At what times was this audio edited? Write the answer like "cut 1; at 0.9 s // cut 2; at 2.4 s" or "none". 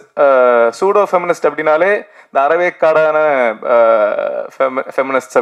none